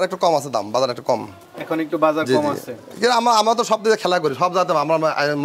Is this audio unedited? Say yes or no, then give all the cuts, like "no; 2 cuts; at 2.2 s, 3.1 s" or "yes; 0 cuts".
yes; 0 cuts